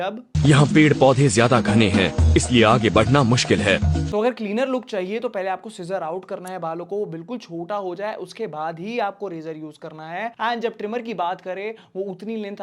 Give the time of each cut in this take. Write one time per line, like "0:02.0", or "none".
none